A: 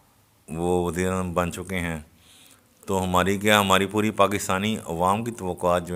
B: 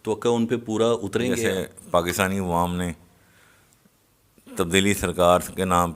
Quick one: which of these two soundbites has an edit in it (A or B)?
B